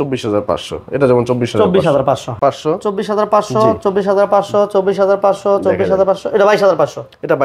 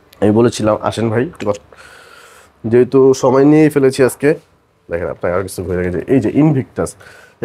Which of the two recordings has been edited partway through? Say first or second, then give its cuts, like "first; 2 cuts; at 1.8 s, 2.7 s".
first; 1 cut; at 2.4 s